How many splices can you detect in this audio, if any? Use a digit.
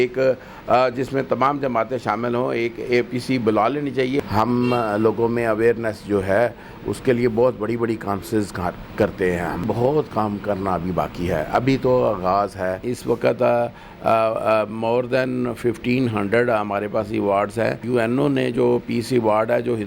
4